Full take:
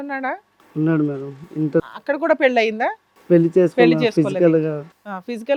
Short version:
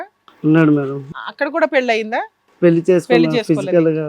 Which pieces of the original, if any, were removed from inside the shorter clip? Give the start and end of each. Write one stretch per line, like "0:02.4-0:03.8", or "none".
0:01.5-0:01.9